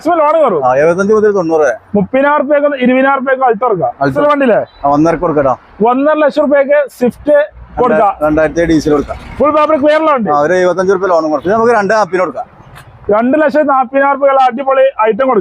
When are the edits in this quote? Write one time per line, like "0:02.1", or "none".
0:04.1
0:11.4

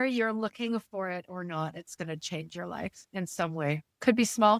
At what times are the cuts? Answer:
none

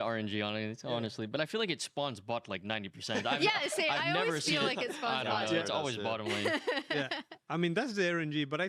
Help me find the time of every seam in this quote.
0:07.3

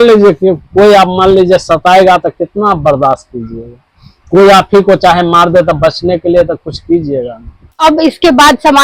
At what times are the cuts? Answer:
0:07.8

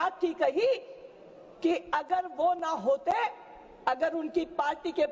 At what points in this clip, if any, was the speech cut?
none

